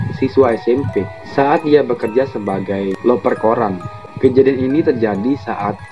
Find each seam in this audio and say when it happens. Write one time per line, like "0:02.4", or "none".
0:01.2